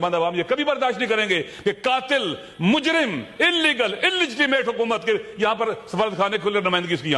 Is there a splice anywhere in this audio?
no; 0 cuts

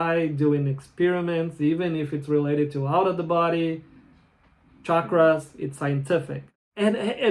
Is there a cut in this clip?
yes; 1 cut; at 6.4 s

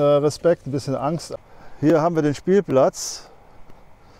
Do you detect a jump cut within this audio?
yes; 1 cut; at 1.2 s

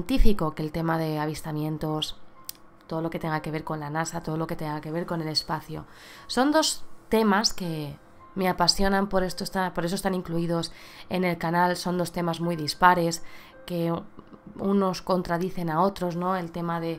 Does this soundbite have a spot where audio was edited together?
yes; 1 cut; at 1.3 s

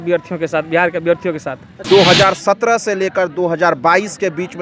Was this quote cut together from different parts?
yes; 1 cut; at 1.8 s

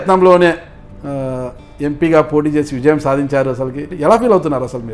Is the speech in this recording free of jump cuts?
no; 1 cut; at 3.9 s

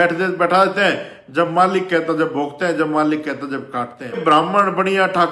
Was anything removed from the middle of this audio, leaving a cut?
yes; 1 cut; at 4.2 s

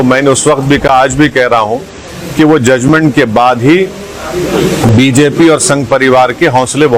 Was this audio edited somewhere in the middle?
no; 0 cuts

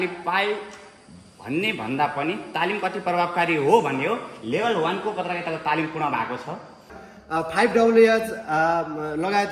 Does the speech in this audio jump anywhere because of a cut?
yes; 1 cut; at 7.0 s

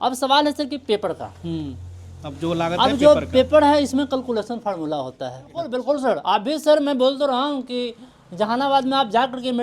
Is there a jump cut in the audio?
yes; 1 cut; at 5.7 s

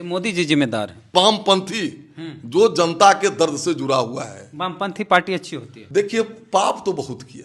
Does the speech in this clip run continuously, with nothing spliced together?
no; 2 cuts; at 1.1 s, 5.7 s

